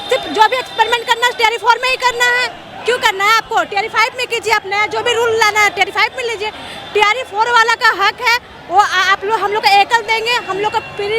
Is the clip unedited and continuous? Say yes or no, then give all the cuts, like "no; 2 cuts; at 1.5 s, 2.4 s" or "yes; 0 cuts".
yes; 0 cuts